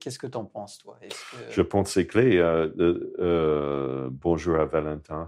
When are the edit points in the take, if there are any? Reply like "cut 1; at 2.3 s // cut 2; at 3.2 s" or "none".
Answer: none